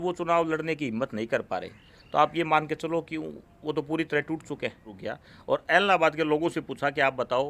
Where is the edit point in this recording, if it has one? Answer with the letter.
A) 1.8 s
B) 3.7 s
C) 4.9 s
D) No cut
C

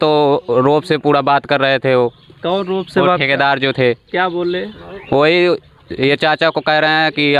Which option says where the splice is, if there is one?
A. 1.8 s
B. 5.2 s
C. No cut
C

